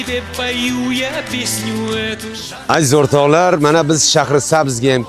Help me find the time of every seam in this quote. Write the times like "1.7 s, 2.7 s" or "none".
2.5 s